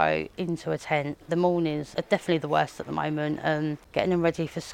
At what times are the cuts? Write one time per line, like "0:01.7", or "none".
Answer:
0:01.2
0:01.8
0:03.8